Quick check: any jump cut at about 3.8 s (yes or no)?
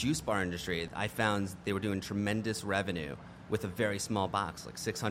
no